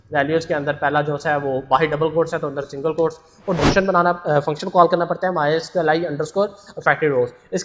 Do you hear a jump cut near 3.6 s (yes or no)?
yes